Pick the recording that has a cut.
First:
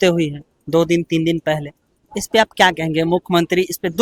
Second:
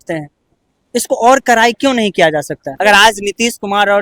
second; 1 cut; at 2.8 s

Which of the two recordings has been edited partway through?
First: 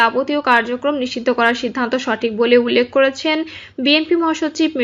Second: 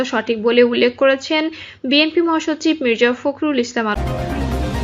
second; 1 cut; at 3.9 s

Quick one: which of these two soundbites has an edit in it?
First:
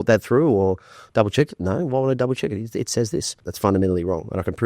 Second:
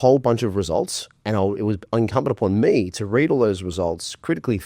first; 1 cut; at 3.4 s

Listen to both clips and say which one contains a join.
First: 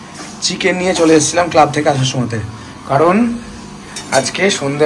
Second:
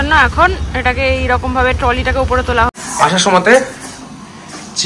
second; 1 cut; at 2.8 s

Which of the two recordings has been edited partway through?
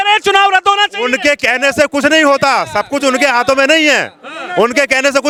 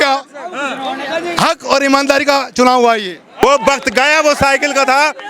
second; 1 cut; at 3.4 s

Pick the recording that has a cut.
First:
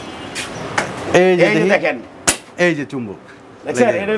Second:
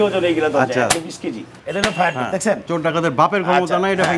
second; 1 cut; at 1.6 s

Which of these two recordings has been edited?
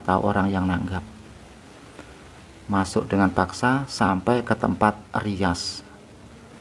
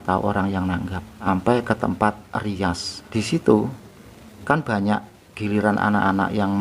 second; 2 cuts; at 1.3 s, 3.0 s

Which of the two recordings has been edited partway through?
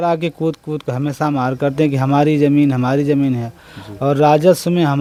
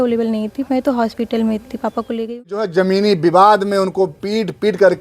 second; 1 cut; at 2.4 s

